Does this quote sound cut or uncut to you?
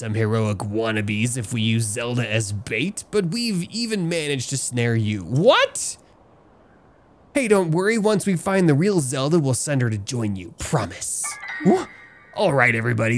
uncut